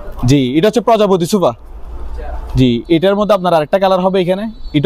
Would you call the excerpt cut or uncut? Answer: uncut